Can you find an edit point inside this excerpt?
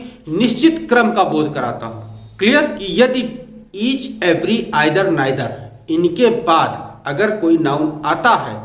yes; 1 cut; at 2.7 s

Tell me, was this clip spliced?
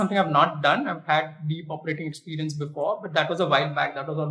no; 0 cuts

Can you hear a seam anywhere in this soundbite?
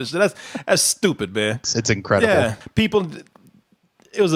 yes; 2 cuts; at 1.6 s, 2.6 s

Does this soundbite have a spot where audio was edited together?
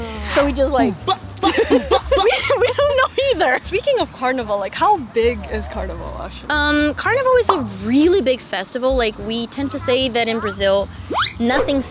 no; 0 cuts

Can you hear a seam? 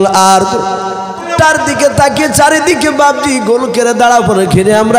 yes; 1 cut; at 1.3 s

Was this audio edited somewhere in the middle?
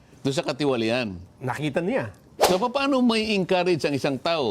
yes; 1 cut; at 2.5 s

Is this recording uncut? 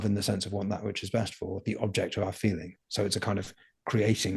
yes; 0 cuts

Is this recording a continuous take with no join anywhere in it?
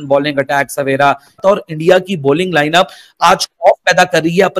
no; 1 cut; at 1.3 s

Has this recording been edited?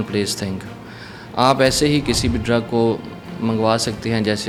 no; 0 cuts

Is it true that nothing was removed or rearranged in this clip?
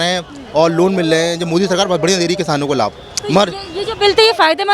yes; 0 cuts

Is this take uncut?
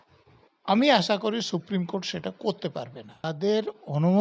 no; 1 cut; at 3.3 s

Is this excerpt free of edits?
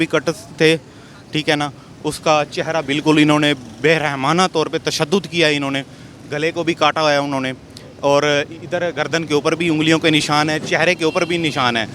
yes; 0 cuts

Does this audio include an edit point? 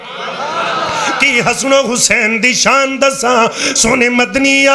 no; 0 cuts

